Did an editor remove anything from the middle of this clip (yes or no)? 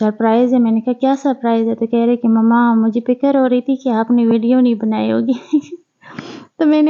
no